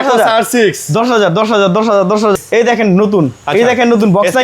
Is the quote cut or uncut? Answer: cut